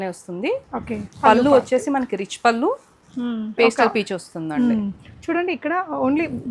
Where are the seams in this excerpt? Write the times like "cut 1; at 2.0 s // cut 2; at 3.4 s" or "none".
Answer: cut 1; at 3.5 s